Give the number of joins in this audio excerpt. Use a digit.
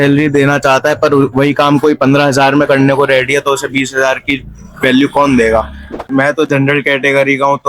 1